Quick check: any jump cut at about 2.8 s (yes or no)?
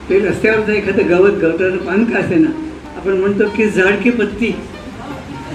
no